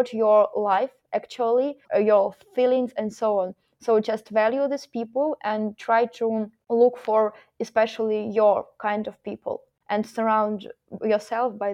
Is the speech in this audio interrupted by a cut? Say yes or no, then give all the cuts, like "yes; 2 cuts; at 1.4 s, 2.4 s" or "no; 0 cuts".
yes; 3 cuts; at 1.8 s, 6.5 s, 9.7 s